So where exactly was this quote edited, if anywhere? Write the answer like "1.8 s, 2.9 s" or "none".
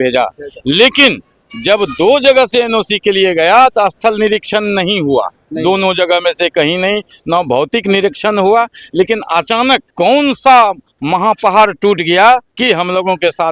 9.9 s, 12.5 s